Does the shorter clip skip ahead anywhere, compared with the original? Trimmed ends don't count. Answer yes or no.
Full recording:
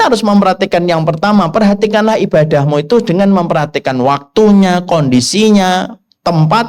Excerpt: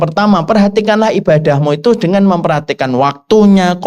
no